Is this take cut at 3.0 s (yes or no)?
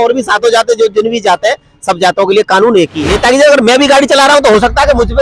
yes